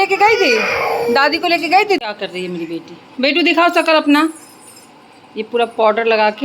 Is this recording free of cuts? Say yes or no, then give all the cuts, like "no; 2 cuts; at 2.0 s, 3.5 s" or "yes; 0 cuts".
no; 1 cut; at 2.0 s